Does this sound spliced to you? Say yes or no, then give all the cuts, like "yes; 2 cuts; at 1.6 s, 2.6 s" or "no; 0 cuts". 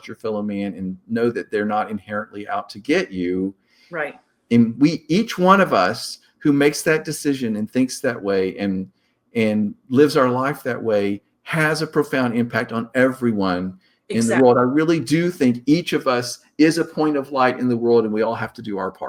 no; 0 cuts